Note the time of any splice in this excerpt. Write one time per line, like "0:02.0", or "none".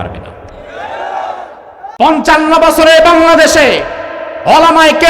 0:01.9